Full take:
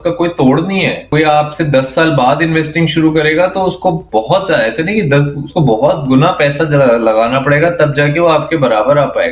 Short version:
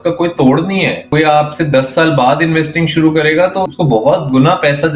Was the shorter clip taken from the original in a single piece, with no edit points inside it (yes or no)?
no